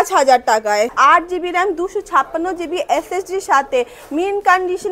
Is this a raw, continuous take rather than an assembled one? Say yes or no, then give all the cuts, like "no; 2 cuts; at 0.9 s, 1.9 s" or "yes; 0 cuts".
no; 1 cut; at 1.0 s